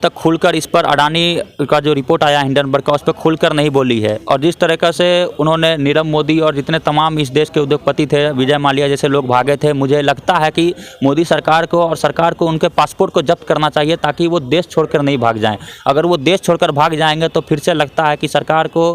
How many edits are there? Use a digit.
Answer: 0